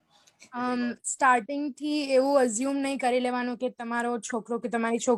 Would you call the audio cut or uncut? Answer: uncut